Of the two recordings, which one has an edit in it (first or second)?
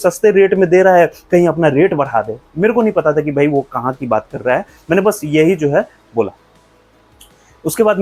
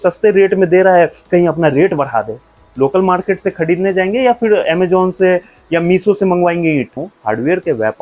second